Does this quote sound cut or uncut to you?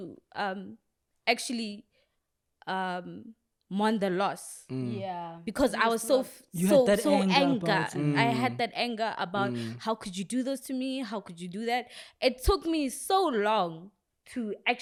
uncut